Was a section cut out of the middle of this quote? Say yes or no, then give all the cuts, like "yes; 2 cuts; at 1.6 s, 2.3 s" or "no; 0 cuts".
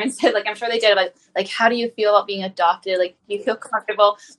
no; 0 cuts